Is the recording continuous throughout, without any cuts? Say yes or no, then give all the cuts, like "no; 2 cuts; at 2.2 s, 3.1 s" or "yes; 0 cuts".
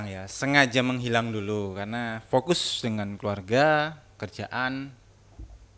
yes; 0 cuts